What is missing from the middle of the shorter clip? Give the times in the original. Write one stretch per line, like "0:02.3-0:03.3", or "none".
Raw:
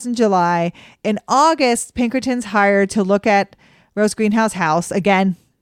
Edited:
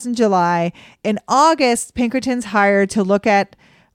none